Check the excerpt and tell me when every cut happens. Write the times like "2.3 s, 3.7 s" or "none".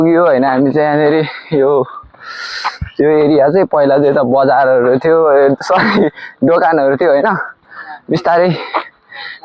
none